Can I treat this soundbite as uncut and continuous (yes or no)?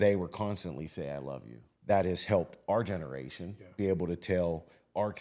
no